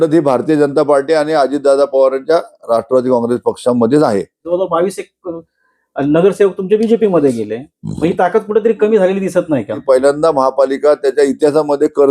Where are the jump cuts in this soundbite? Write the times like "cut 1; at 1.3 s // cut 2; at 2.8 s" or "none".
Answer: cut 1; at 4.4 s // cut 2; at 9.8 s